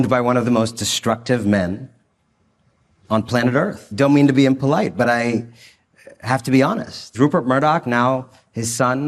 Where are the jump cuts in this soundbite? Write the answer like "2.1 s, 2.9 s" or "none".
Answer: 3.8 s, 7.1 s